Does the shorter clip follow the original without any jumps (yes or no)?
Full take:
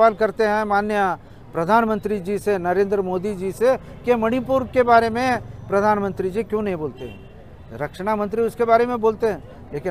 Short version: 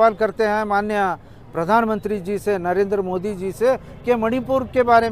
yes